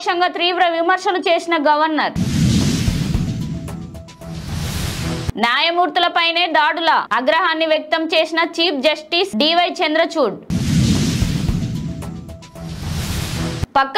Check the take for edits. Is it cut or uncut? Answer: uncut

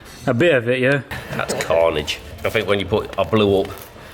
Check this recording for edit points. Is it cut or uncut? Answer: cut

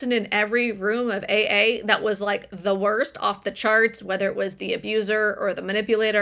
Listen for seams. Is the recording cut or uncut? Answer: uncut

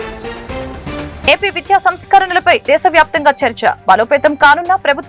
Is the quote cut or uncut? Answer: cut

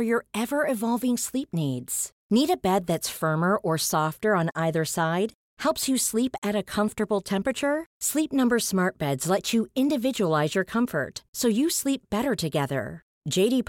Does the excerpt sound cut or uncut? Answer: uncut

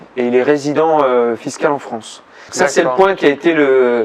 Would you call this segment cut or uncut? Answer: cut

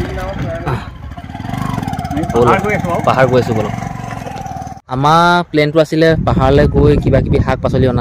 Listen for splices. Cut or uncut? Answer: cut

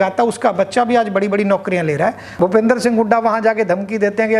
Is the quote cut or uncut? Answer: cut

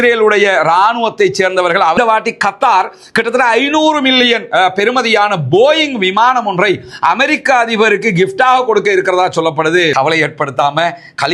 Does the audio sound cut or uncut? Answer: cut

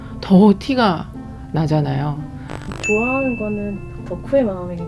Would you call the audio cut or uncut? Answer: cut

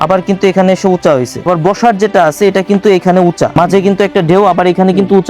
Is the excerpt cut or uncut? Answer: cut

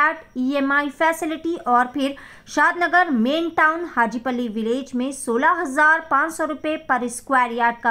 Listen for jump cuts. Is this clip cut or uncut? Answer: uncut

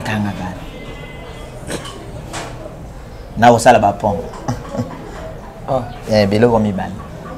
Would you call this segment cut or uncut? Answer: uncut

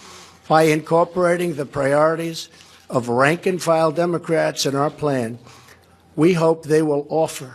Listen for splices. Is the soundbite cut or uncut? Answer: uncut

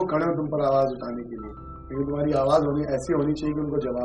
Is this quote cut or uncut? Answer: uncut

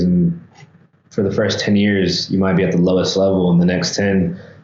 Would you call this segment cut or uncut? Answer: uncut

